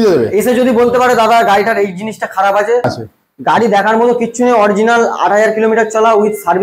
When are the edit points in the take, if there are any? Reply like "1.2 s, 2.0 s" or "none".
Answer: 3.0 s